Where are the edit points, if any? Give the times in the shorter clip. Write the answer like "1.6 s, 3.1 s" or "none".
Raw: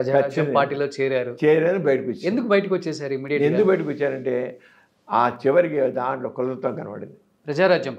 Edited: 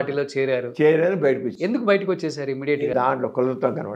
2.9 s

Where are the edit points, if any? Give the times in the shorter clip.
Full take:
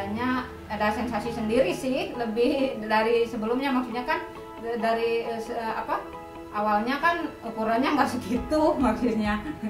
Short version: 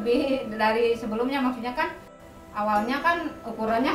2.2 s

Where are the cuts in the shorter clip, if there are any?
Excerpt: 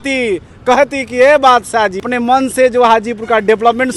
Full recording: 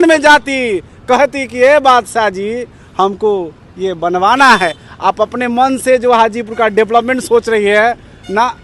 2.0 s

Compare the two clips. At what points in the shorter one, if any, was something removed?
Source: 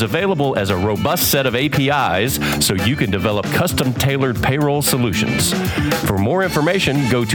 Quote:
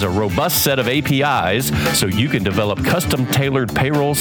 none

